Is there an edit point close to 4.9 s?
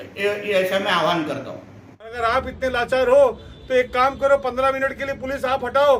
no; 1 cut; at 2.1 s

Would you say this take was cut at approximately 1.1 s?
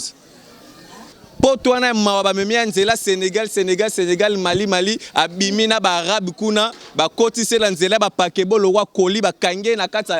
yes; 1 cut; at 1.1 s

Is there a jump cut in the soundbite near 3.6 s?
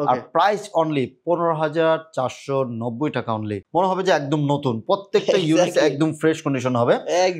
yes; 1 cut; at 3.6 s

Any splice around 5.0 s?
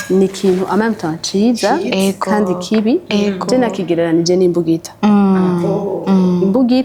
no; 0 cuts

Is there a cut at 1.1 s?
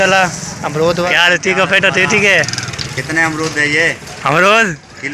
yes; 1 cut; at 1.1 s

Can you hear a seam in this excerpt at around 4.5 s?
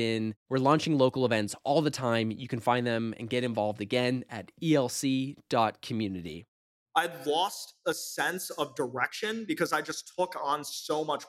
no; 1 cut; at 6.5 s

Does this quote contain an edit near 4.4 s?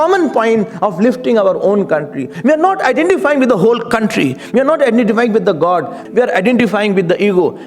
no; 2 cuts; at 2.3 s, 6.0 s

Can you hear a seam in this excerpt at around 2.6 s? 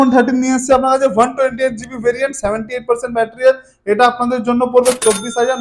no; 0 cuts

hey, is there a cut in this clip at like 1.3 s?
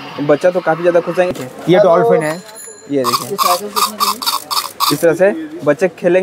yes; 1 cut; at 1.3 s

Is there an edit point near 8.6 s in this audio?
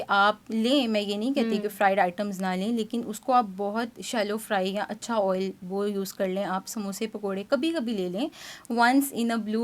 no; 0 cuts

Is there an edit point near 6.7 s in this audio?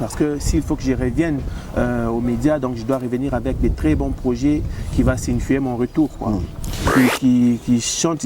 yes; 1 cut; at 6.7 s

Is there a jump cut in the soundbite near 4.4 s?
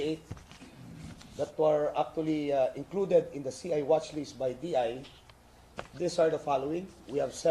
no; 1 cut; at 1.8 s

